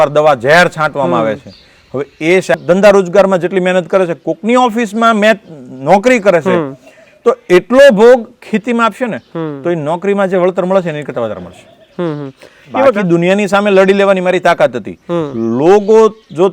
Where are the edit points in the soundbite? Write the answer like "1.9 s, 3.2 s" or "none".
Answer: 2.5 s, 12.9 s